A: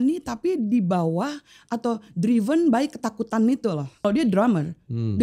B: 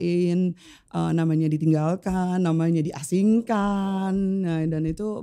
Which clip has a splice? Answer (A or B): A